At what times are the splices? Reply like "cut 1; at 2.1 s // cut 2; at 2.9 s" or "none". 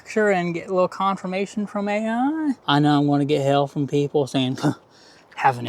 cut 1; at 2.6 s